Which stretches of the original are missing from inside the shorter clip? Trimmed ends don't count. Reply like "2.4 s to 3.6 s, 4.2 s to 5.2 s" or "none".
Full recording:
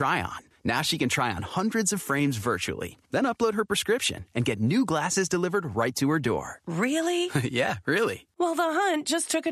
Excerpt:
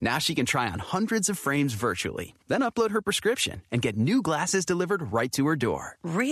none